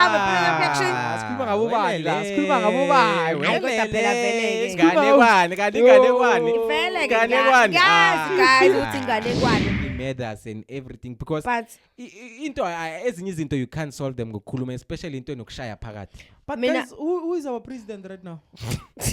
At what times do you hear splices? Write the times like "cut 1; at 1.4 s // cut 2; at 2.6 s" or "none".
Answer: cut 1; at 9.7 s